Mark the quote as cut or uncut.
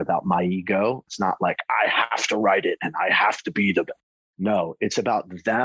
cut